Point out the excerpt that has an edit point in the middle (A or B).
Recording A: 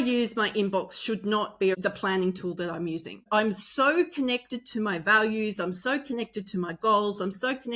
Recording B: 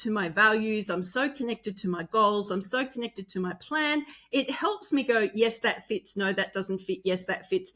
A